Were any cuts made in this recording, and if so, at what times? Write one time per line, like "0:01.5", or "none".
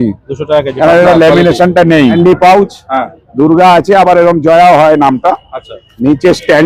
0:02.2